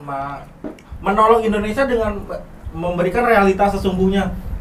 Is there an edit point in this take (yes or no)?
no